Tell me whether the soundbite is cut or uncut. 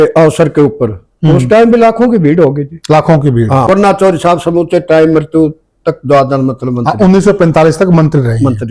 cut